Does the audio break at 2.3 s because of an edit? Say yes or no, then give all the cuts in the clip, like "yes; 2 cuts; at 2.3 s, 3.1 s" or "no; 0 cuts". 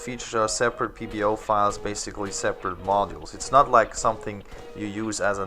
yes; 1 cut; at 2.3 s